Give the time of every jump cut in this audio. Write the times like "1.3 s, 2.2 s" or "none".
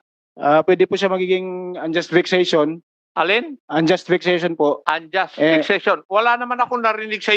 4.8 s